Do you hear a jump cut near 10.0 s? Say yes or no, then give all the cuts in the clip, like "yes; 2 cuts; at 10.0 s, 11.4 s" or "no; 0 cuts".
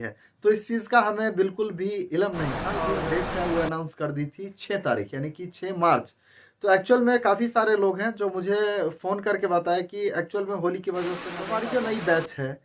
no; 2 cuts; at 2.9 s, 11.3 s